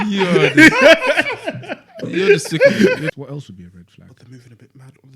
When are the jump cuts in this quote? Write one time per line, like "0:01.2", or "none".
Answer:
0:03.0